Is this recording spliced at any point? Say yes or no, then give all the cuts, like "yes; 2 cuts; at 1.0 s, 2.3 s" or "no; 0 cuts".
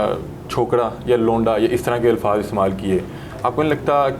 no; 0 cuts